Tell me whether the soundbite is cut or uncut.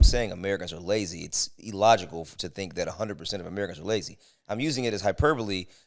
uncut